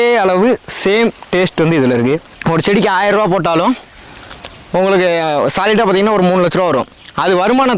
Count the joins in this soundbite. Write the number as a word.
one